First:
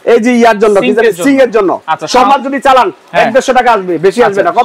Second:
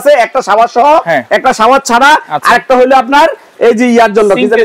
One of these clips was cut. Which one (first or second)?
first